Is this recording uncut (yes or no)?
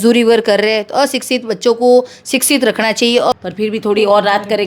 no